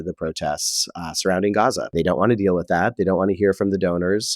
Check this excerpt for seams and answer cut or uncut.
cut